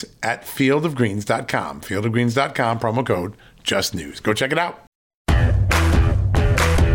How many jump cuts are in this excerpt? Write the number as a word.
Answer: one